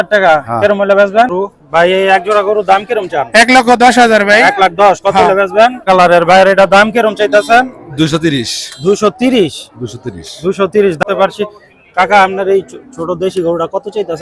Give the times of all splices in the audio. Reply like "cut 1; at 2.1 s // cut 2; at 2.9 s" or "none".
cut 1; at 1.3 s // cut 2; at 5.8 s // cut 3; at 11.0 s